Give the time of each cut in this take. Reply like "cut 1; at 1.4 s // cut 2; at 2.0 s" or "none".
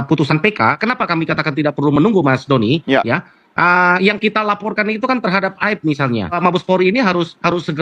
cut 1; at 6.4 s